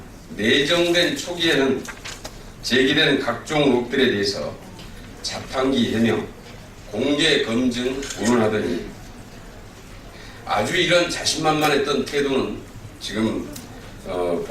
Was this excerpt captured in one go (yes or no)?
no